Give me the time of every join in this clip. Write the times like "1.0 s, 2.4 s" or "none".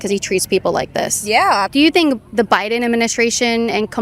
1.7 s